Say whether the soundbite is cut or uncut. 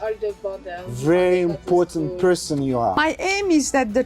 cut